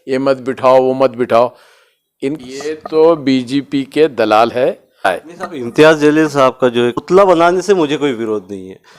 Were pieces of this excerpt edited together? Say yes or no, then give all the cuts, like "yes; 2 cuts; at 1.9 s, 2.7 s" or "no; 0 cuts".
yes; 3 cuts; at 2.4 s, 5.1 s, 7.0 s